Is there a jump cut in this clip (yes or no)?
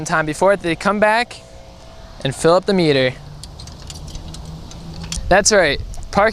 yes